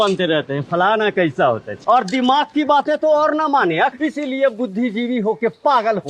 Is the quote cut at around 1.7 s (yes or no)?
yes